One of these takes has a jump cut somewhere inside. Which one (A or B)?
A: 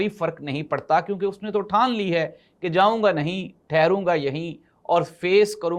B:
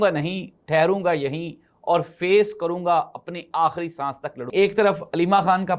B